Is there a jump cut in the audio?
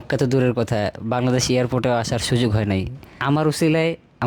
yes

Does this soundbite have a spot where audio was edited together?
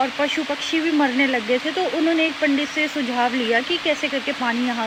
no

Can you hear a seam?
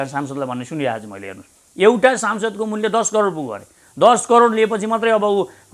no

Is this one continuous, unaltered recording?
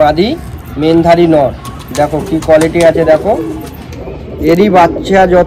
yes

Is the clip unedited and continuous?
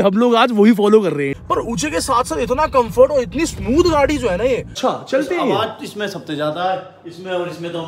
no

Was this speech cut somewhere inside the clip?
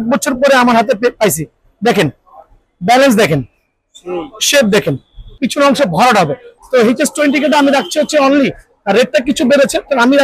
yes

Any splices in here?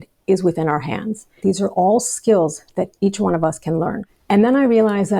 yes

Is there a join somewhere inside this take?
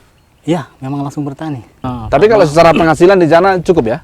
yes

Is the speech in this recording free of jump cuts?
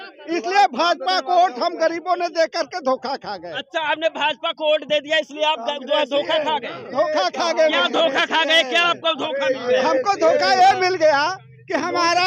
yes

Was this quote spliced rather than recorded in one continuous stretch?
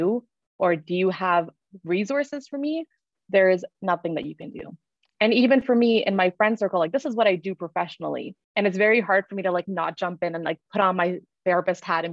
yes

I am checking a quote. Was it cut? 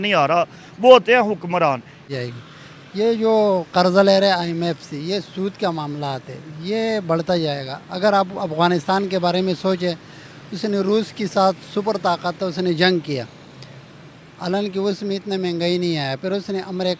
yes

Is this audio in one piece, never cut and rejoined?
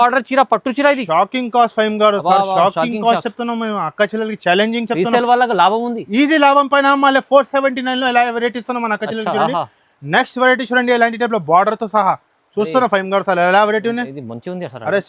yes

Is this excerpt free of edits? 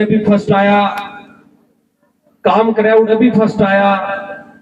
yes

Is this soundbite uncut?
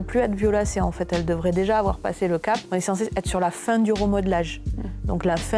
yes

